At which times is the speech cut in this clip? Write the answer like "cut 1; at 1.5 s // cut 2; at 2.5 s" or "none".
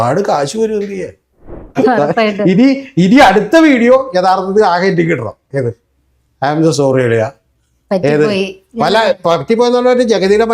cut 1; at 1.7 s